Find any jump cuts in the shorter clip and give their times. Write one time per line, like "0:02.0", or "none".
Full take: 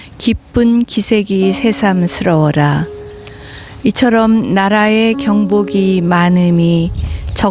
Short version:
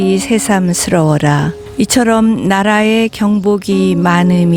0:01.6